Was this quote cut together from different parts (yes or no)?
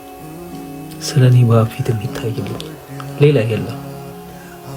no